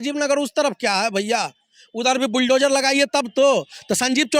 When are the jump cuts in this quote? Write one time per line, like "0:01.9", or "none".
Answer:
none